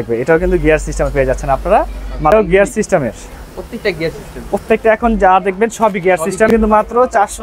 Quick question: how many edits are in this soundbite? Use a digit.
2